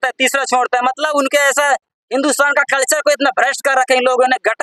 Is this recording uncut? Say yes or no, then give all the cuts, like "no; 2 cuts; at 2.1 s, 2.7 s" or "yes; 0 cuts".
yes; 0 cuts